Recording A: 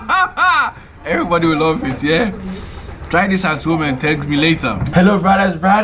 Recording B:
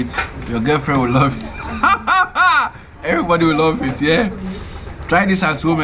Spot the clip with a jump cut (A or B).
A